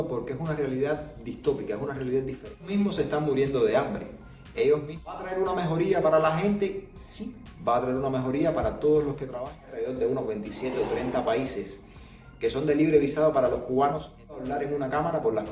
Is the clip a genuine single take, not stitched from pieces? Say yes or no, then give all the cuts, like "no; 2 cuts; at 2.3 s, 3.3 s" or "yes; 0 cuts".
no; 4 cuts; at 2.7 s, 5.3 s, 9.7 s, 14.4 s